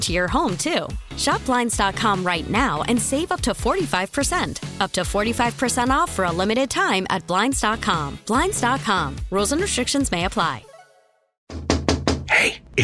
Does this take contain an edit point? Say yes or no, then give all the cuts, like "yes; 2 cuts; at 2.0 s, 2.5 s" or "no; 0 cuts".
yes; 1 cut; at 11.6 s